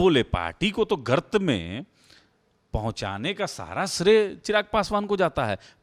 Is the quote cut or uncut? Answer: uncut